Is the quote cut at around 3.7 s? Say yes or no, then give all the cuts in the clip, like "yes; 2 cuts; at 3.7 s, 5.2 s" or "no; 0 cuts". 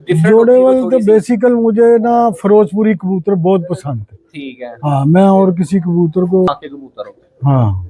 no; 1 cut; at 6.5 s